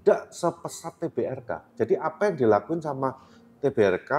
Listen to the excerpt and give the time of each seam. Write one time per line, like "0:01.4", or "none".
none